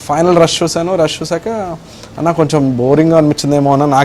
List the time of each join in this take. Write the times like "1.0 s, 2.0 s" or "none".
none